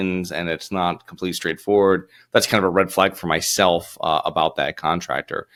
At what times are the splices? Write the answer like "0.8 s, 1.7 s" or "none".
none